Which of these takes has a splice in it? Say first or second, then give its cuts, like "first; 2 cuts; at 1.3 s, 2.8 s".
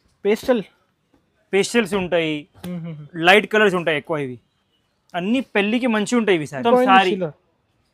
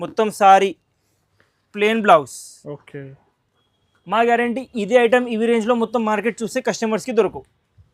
first; 1 cut; at 6.6 s